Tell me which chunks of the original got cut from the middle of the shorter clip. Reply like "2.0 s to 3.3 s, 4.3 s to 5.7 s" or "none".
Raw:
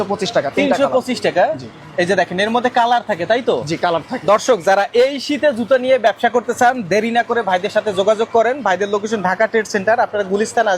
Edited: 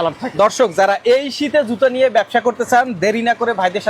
none